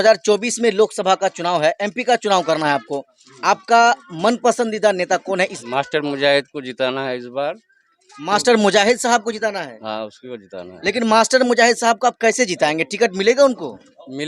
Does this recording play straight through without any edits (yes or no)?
no